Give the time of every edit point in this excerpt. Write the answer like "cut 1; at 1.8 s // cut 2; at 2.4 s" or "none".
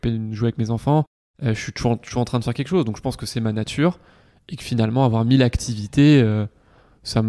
cut 1; at 1.2 s